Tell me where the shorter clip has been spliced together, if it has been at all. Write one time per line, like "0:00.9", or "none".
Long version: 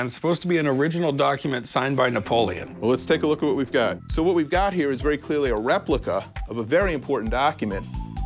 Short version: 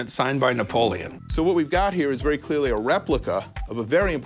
0:01.2

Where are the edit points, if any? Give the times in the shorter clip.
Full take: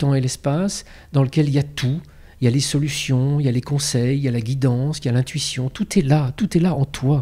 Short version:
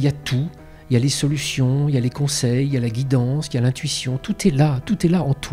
none

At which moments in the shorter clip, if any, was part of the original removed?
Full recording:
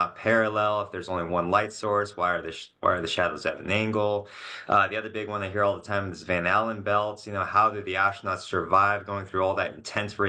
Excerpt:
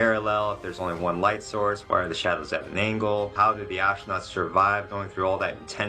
0:01.8
0:03.3

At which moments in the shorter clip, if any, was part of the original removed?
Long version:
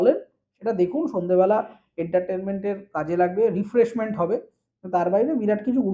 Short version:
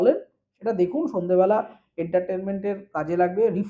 none

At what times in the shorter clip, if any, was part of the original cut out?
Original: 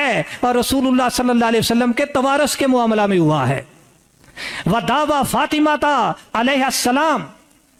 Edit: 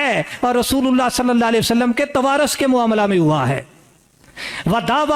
none

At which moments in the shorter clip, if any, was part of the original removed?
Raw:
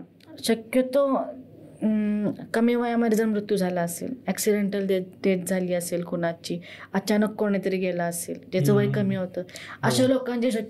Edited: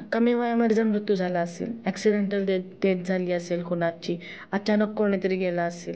none

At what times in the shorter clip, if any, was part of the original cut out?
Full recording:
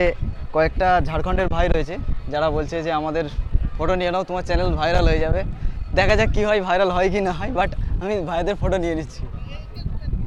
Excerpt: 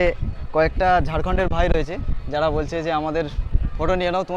none

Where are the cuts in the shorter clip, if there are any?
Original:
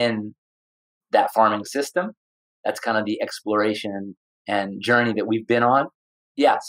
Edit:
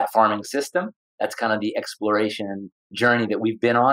0:01.0
0:02.9

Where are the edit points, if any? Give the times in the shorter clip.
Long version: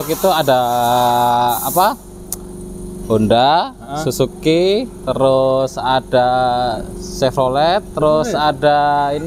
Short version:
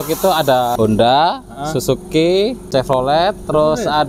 0:00.7
0:02.6

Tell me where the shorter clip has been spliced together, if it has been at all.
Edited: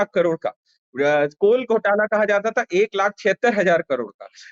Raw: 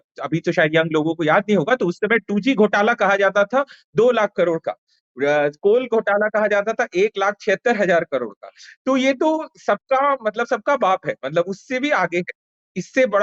none

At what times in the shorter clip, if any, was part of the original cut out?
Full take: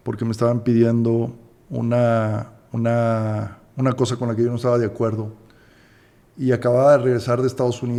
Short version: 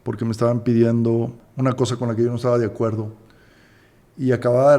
0:01.4

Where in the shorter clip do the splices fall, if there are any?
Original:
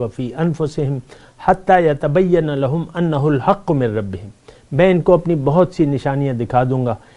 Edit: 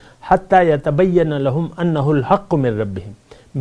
none

